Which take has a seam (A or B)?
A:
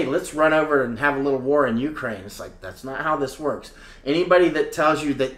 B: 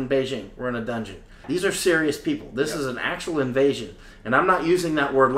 B